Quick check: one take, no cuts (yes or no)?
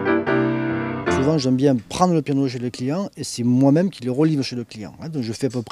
yes